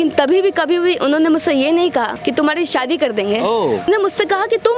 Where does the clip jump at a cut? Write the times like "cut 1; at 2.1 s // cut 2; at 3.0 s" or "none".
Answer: cut 1; at 2.1 s // cut 2; at 3.9 s